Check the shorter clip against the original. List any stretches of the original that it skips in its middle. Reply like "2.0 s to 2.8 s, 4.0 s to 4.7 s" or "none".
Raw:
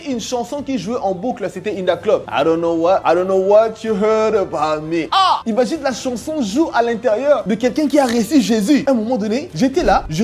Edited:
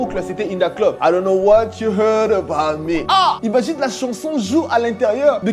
2.3 s to 3.0 s